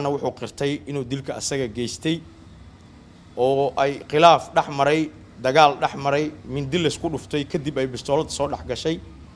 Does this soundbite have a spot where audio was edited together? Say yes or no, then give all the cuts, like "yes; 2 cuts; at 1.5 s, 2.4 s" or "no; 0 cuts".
no; 0 cuts